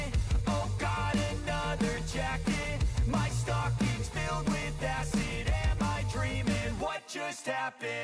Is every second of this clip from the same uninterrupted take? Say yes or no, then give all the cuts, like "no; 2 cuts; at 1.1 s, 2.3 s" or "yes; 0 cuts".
yes; 0 cuts